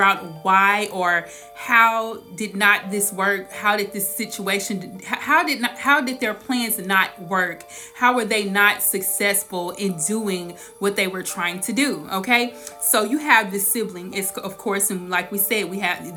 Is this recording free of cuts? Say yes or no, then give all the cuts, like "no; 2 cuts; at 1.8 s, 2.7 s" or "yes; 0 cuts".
yes; 0 cuts